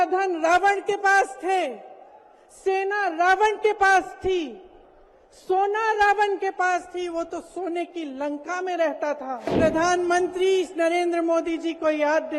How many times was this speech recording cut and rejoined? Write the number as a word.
one